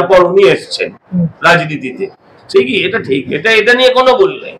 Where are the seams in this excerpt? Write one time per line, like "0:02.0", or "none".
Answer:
none